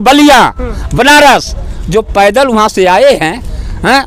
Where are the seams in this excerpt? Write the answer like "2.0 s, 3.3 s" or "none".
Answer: none